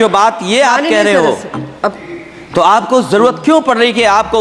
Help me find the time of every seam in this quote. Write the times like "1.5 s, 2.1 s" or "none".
none

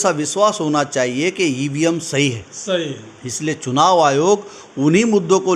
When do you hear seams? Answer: none

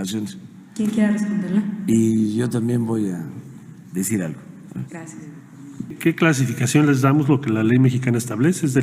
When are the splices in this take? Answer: 5.9 s

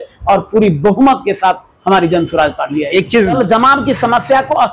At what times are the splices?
3.4 s

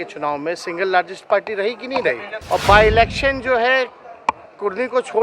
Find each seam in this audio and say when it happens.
2.3 s

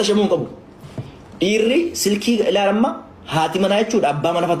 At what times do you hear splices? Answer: none

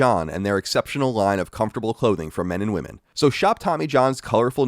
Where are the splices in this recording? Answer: 3.0 s

